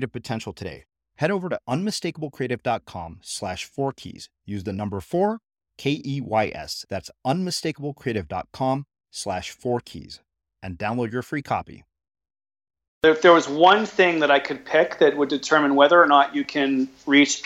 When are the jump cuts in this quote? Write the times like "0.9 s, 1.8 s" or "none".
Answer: 13.0 s